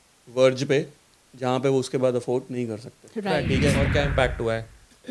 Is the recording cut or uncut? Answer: cut